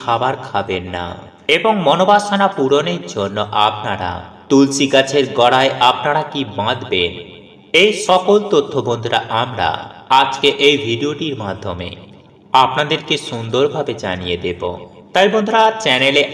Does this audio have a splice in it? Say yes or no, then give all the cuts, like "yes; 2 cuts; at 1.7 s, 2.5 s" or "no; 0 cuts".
no; 0 cuts